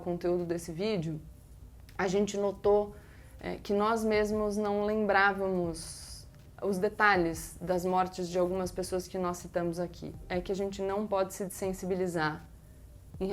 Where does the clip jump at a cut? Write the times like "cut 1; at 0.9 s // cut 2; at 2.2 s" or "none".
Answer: cut 1; at 10.2 s